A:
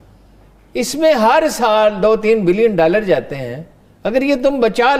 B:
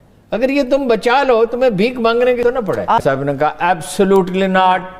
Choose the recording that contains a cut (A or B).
B